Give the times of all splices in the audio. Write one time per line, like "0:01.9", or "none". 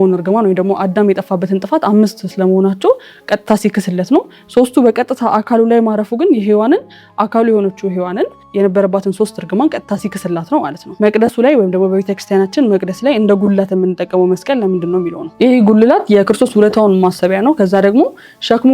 0:08.4
0:10.9